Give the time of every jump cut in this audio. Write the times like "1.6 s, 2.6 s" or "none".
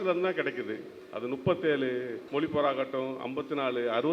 2.2 s